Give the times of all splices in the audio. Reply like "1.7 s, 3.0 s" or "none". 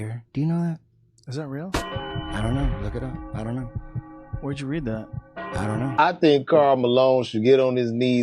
5.9 s